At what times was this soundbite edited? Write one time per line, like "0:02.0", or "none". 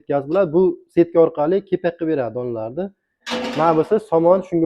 0:03.1